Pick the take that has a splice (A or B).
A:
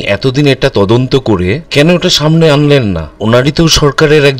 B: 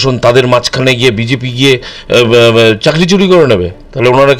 A